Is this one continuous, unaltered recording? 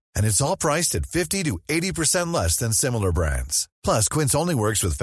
yes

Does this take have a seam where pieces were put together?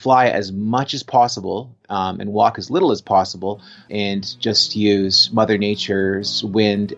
yes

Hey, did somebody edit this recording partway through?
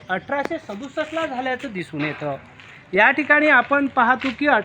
no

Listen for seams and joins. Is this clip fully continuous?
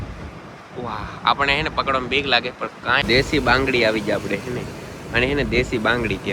no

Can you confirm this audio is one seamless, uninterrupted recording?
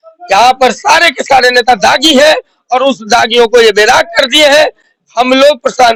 yes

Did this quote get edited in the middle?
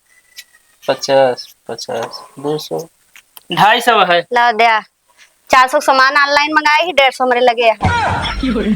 yes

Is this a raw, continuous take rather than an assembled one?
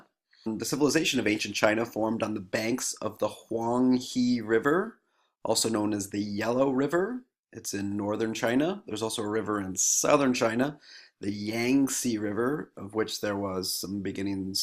no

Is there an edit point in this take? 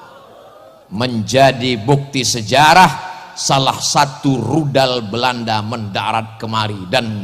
no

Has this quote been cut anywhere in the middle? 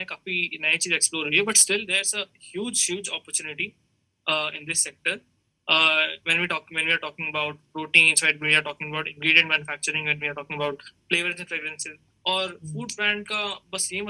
no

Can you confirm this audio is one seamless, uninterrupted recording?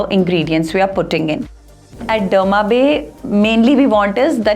no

